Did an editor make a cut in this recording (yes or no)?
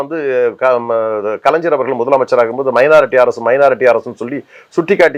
no